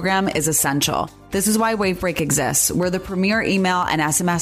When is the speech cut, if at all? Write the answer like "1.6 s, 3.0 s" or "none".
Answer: none